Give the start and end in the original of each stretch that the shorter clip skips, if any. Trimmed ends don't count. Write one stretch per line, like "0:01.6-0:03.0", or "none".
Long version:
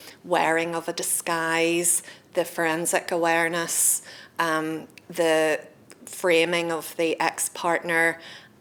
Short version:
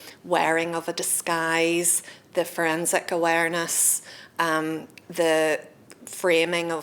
none